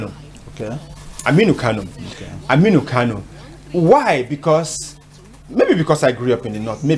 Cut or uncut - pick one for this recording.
uncut